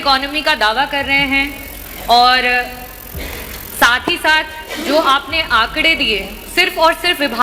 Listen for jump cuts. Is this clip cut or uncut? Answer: uncut